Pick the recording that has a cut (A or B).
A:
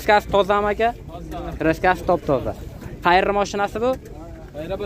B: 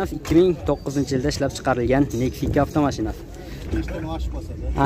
B